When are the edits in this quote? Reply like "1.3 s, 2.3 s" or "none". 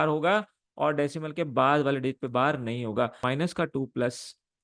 3.2 s